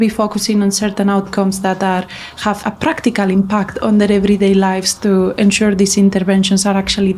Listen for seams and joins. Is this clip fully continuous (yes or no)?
no